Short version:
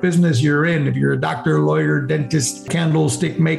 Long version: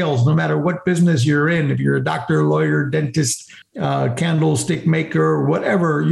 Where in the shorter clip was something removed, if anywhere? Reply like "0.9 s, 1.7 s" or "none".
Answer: 2.7 s